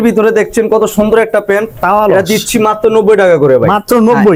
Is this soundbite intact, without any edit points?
yes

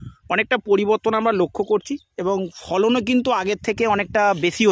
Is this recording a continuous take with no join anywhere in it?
yes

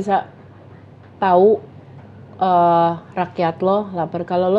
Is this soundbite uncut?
yes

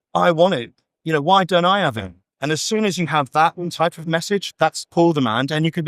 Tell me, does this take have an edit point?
yes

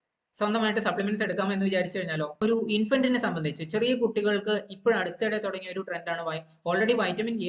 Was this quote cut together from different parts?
yes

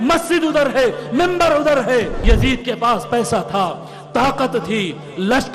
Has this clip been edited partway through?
yes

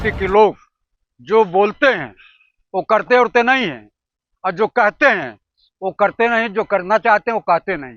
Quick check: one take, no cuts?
yes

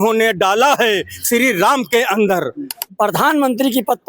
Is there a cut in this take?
yes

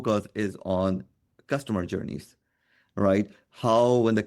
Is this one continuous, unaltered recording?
yes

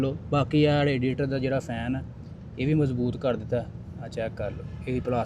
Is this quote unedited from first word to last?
yes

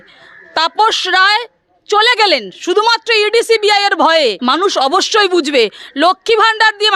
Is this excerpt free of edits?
no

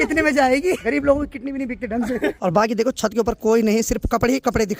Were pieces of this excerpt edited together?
yes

